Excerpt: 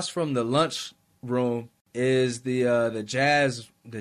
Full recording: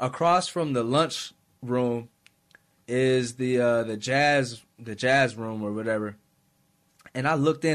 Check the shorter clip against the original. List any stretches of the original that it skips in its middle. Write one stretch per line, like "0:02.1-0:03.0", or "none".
0:02.2-0:02.7